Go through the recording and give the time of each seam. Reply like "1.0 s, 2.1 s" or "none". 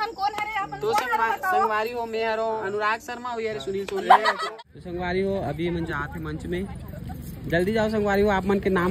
2.6 s, 4.4 s